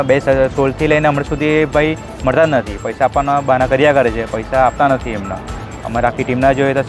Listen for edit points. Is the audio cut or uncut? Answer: uncut